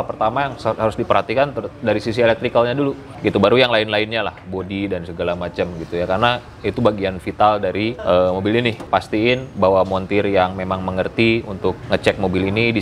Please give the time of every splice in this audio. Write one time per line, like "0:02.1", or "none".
0:03.1
0:08.0
0:08.8
0:11.8